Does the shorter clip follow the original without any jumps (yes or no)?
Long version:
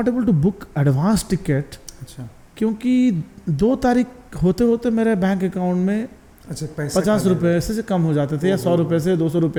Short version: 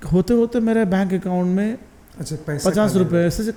yes